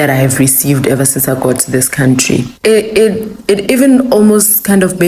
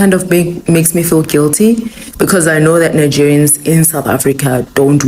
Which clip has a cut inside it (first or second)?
first